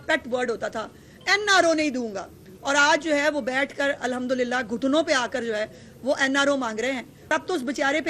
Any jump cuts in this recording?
yes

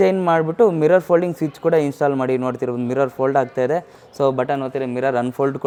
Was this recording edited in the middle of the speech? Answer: no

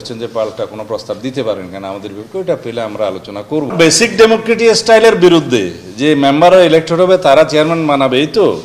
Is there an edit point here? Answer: yes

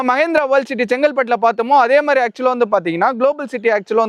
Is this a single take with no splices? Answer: yes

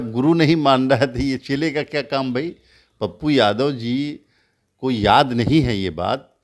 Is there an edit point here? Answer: no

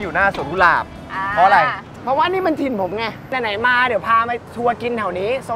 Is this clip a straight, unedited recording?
no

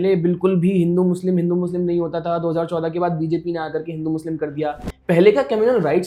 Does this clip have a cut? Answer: no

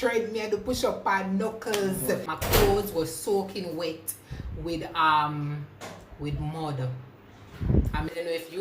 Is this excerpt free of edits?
no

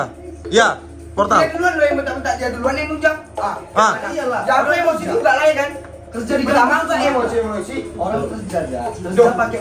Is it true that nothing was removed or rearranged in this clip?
yes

